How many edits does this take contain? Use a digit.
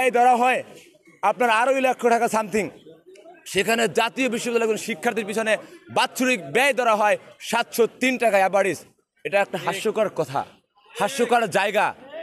0